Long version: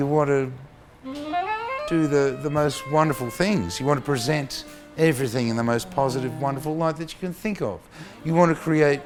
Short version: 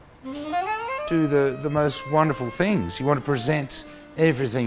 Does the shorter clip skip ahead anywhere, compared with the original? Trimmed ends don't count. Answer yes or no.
no